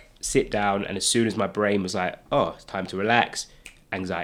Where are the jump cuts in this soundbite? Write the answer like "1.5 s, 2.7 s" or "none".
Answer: none

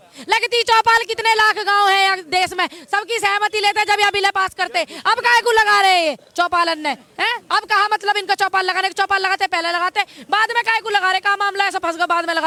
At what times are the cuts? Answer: none

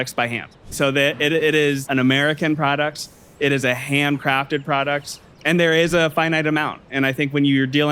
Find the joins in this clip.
0.7 s, 1.8 s, 5.3 s

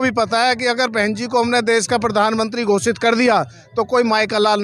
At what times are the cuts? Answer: none

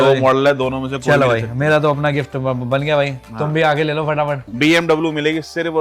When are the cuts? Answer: 4.4 s

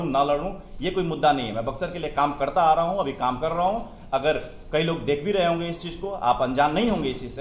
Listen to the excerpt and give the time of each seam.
none

